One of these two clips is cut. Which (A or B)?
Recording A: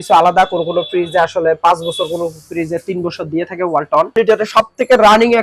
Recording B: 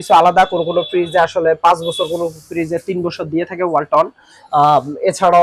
A